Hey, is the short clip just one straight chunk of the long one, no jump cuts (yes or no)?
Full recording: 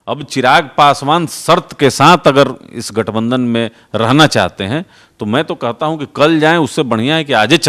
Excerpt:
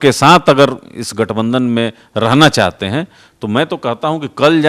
yes